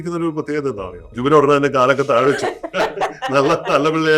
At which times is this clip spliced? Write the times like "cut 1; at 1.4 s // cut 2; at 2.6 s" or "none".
cut 1; at 1.0 s